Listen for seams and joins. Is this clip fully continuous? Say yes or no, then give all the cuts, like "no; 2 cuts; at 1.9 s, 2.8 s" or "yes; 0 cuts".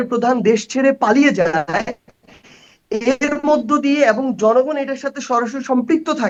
yes; 0 cuts